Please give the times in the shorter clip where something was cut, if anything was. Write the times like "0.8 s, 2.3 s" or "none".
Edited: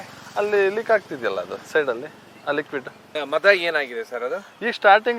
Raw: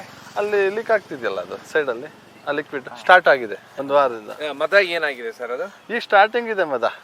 2.9 s